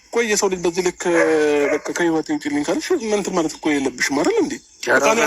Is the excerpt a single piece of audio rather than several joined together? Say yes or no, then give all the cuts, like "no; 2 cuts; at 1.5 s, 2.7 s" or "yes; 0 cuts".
yes; 0 cuts